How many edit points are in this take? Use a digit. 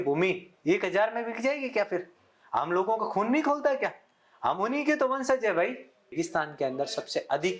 1